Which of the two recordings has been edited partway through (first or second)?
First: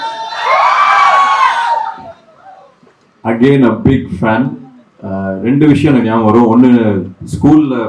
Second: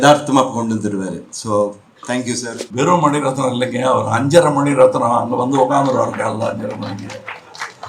second